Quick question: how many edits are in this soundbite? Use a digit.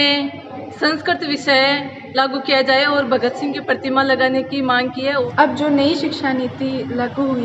1